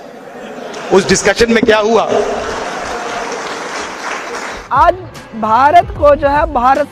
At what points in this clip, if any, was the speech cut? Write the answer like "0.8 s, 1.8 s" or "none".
4.5 s